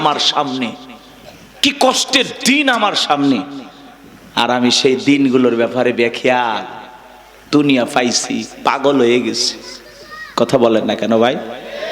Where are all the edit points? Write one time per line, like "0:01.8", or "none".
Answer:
none